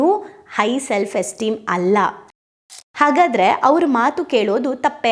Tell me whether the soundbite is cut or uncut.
cut